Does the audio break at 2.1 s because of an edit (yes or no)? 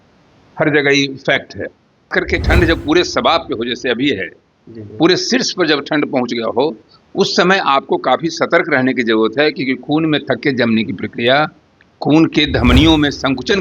yes